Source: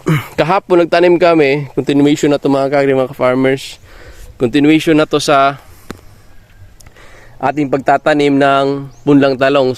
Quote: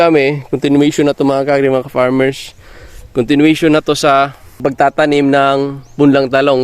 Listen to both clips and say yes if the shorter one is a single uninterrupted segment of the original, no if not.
no